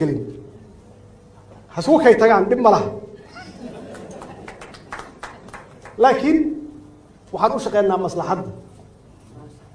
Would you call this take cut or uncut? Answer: cut